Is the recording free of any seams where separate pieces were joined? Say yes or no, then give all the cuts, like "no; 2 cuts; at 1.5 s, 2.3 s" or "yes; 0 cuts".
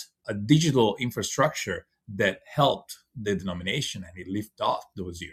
yes; 0 cuts